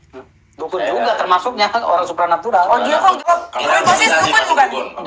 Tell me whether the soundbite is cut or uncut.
cut